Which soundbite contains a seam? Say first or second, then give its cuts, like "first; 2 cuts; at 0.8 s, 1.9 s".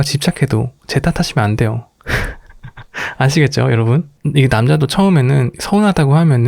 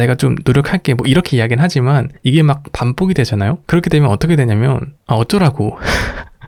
first; 1 cut; at 4.1 s